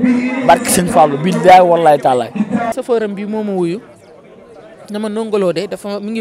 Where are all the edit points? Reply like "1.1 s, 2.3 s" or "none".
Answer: 2.7 s